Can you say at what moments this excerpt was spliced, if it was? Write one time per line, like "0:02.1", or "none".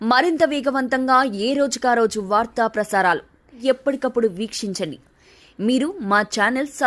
0:03.5

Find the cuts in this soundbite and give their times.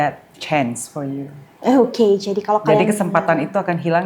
none

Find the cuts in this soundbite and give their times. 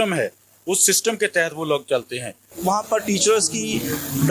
0:02.6

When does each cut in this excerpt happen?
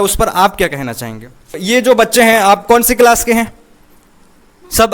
0:01.6

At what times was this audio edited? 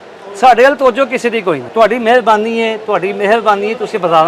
0:01.6

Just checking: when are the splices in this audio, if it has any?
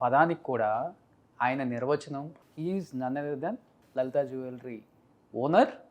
0:02.3
0:03.7

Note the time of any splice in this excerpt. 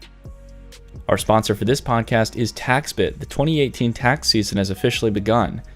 0:01.0

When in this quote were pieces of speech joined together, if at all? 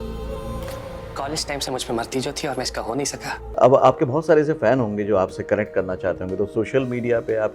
0:03.4

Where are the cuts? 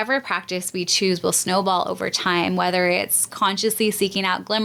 none

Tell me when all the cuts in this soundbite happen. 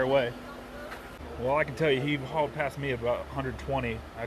0:01.3

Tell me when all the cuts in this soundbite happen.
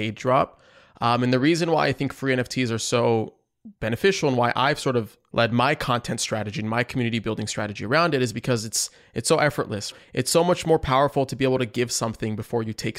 0:09.9

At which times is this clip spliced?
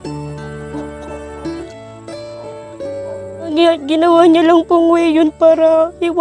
0:01.7
0:03.5

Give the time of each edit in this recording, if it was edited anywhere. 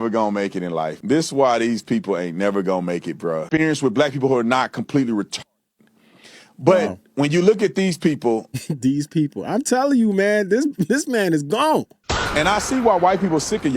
0:03.5

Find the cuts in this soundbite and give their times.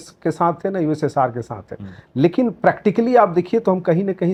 none

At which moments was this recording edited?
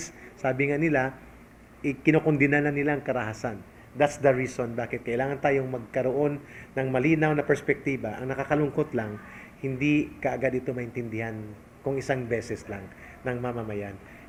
none

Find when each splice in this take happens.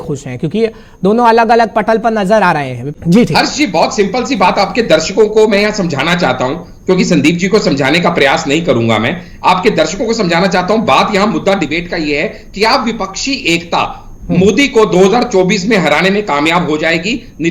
0:02.9

